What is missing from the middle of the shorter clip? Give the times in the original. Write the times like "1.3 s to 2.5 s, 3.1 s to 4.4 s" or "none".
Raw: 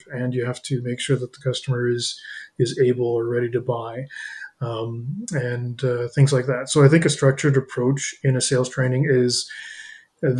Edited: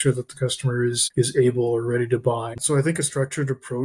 2.1 s to 2.5 s, 4.0 s to 6.6 s